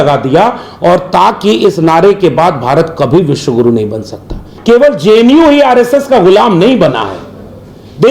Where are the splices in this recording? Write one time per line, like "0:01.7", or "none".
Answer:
0:04.5